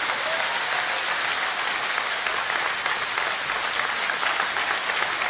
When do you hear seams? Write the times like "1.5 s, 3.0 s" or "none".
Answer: none